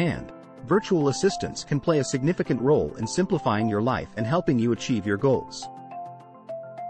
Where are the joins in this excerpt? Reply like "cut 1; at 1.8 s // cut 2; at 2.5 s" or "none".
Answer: cut 1; at 6.0 s